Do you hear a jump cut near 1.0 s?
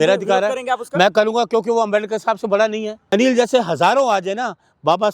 no; 1 cut; at 2.9 s

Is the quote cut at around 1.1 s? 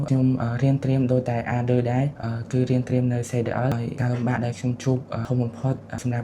no; 1 cut; at 3.5 s

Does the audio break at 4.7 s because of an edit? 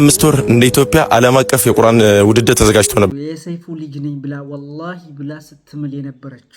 no; 1 cut; at 3.1 s

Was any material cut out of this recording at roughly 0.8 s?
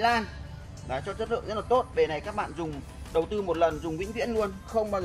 no; 0 cuts

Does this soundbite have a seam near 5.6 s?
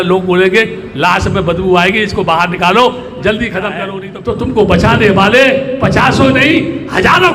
no; 1 cut; at 3.8 s

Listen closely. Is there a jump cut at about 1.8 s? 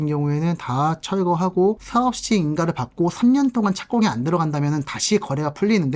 yes; 1 cut; at 1.8 s

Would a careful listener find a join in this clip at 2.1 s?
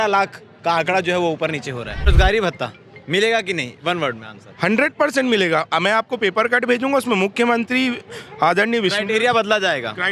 yes; 1 cut; at 2.1 s

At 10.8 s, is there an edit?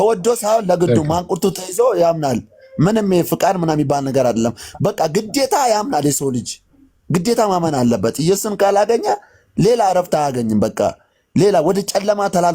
no; 0 cuts

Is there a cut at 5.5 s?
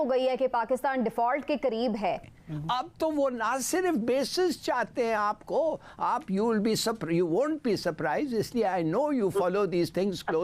no; 1 cut; at 2.2 s

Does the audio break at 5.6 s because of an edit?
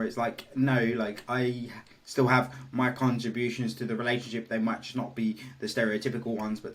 no; 0 cuts

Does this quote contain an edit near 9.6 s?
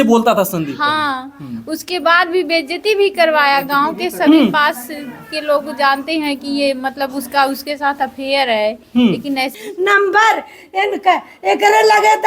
yes; 1 cut; at 9.6 s

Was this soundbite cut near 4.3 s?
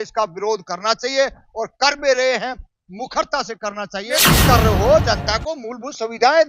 yes; 1 cut; at 4.3 s

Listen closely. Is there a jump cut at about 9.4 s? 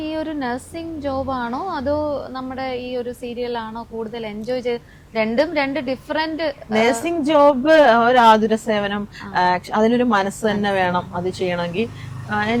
no; 0 cuts

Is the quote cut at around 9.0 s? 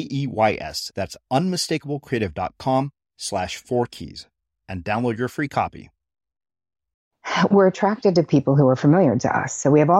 no; 1 cut; at 7.4 s

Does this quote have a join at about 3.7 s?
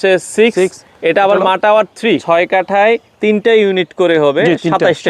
no; 1 cut; at 2.2 s

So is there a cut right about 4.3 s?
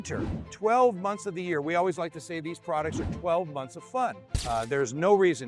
yes; 1 cut; at 4.3 s

